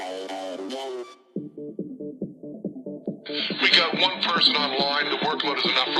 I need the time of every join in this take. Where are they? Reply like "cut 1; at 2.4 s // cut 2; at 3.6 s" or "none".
cut 1; at 1.2 s